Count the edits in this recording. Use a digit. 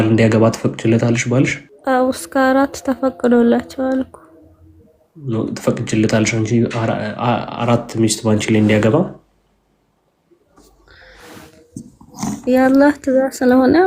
0